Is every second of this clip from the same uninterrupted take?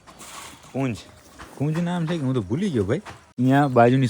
no; 1 cut; at 3.2 s

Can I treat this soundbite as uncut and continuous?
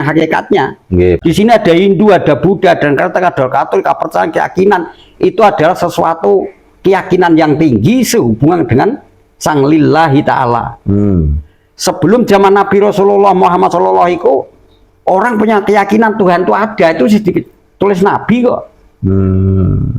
no; 1 cut; at 1.2 s

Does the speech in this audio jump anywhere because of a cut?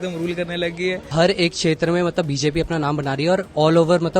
yes; 1 cut; at 1.1 s

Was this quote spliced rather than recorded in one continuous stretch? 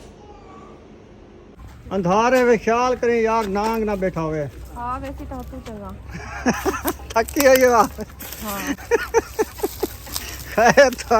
yes; 1 cut; at 1.6 s

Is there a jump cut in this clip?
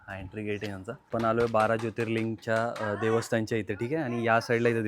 yes; 1 cut; at 1.0 s

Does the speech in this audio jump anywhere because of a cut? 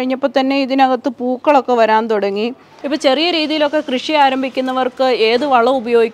yes; 1 cut; at 2.9 s

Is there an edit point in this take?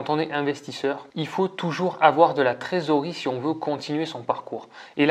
yes; 1 cut; at 1.1 s

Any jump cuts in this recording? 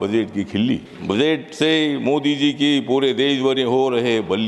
yes; 1 cut; at 0.9 s

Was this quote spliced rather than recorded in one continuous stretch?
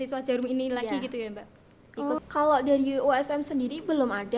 yes; 1 cut; at 2.2 s

